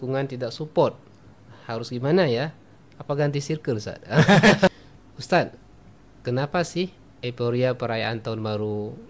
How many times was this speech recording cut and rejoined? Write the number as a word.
one